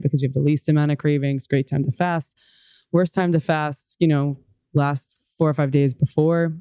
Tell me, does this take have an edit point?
no; 0 cuts

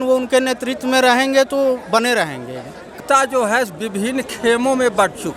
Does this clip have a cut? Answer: yes; 1 cut; at 2.9 s

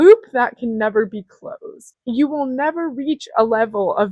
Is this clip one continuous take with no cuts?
no; 1 cut; at 1.9 s

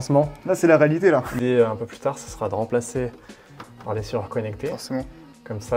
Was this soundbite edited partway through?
yes; 1 cut; at 1.4 s

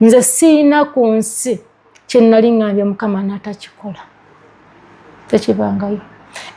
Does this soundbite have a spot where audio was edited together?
no; 0 cuts

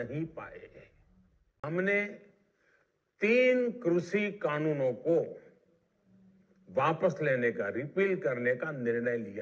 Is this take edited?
yes; 1 cut; at 1.6 s

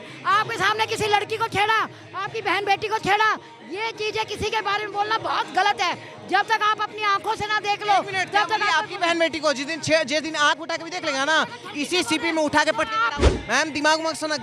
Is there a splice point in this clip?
yes; 1 cut; at 13.2 s

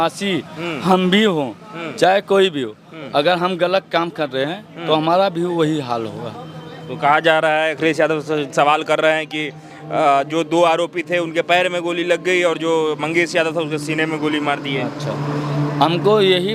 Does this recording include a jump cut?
no; 0 cuts

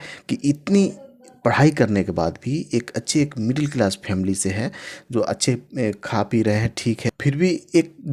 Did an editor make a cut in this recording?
yes; 1 cut; at 7.1 s

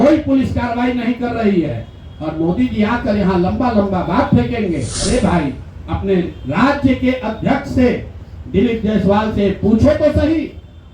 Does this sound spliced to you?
yes; 1 cut; at 4.9 s

